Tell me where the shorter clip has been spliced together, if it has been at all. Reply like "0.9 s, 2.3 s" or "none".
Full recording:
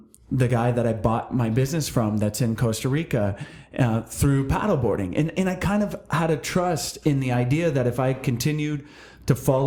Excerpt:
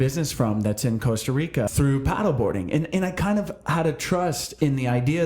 1.7 s